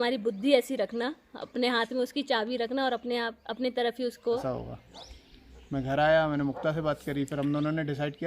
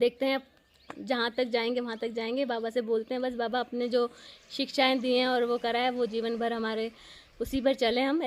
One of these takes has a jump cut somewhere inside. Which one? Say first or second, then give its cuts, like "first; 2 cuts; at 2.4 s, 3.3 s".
first; 1 cut; at 4.4 s